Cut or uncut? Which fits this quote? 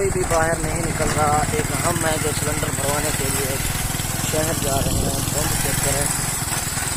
uncut